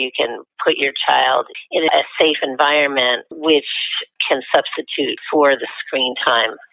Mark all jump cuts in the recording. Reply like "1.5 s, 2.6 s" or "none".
1.9 s, 3.3 s, 4.1 s, 5.2 s